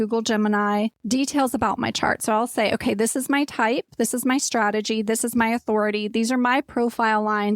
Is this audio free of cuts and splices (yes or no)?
no